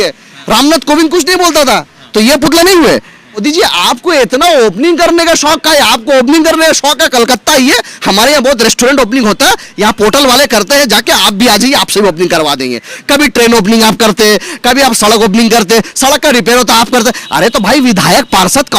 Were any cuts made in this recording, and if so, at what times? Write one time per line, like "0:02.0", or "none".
0:03.4